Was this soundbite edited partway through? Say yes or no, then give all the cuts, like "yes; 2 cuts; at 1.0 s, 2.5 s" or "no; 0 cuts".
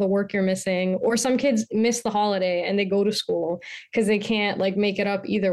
no; 0 cuts